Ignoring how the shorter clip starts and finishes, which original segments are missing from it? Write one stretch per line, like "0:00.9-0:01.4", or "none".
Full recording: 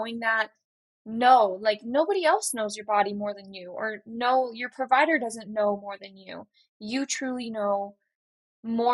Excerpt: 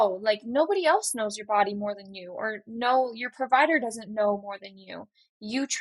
none